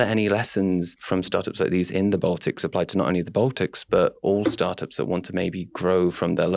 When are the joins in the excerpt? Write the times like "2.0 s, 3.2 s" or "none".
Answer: 0.9 s